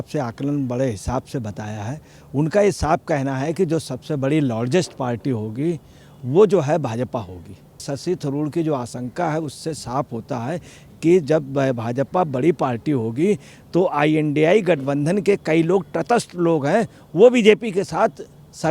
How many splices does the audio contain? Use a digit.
1